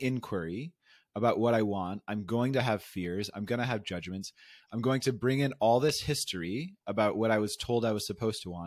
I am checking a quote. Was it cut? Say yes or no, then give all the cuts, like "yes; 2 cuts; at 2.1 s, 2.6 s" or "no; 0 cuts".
no; 0 cuts